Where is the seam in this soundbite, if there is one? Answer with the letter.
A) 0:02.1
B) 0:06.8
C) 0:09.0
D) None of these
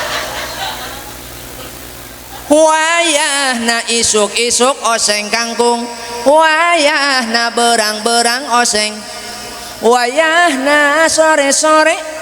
A